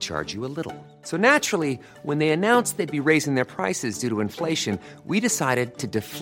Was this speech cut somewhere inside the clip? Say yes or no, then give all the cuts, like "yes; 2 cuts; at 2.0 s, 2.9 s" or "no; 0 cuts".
no; 0 cuts